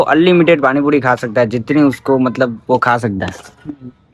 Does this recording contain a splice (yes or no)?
no